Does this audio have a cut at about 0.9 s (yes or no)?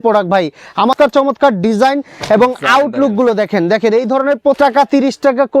yes